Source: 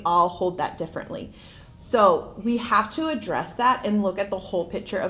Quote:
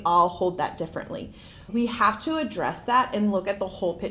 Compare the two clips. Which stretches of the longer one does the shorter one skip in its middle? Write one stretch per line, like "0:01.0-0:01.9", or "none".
0:01.6-0:02.3